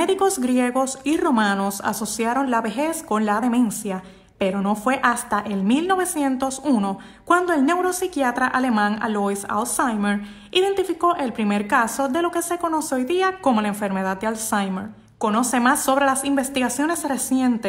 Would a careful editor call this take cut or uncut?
uncut